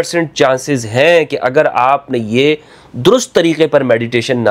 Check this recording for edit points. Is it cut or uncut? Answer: uncut